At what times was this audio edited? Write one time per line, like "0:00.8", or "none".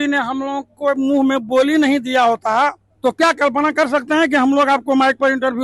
0:02.9